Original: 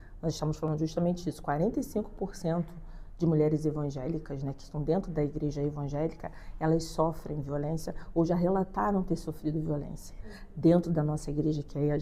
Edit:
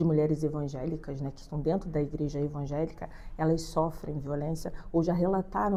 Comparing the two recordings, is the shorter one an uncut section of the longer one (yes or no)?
yes